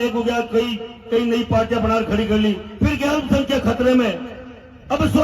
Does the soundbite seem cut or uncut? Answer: uncut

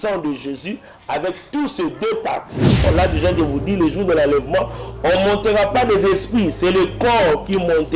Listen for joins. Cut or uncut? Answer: cut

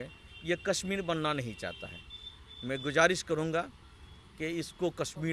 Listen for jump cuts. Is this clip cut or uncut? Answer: uncut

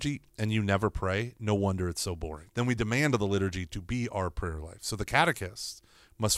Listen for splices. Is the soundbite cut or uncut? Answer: cut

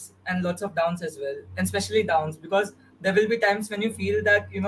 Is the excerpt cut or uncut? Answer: uncut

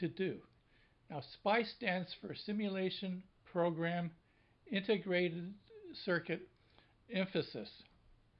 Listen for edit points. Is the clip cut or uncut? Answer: uncut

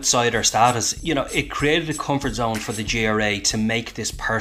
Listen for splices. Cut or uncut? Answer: cut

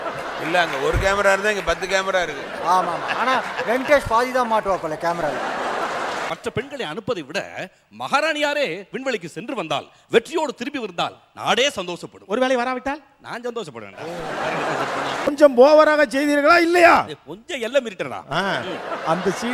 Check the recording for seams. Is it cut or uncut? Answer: cut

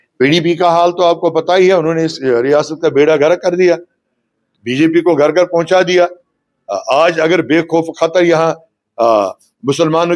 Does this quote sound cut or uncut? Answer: uncut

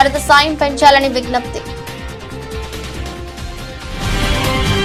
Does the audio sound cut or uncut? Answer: uncut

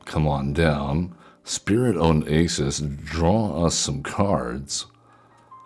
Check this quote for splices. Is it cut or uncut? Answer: uncut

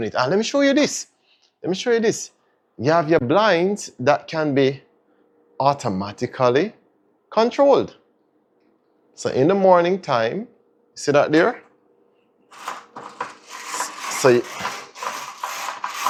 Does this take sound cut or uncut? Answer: uncut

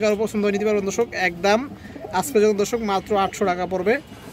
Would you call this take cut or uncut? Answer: uncut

